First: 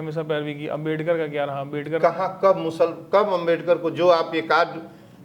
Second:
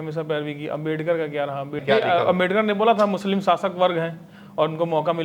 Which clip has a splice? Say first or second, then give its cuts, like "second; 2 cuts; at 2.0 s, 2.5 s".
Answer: second; 1 cut; at 1.8 s